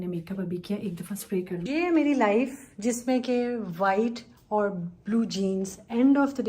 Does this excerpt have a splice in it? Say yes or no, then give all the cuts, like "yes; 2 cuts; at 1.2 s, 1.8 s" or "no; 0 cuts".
yes; 1 cut; at 1.6 s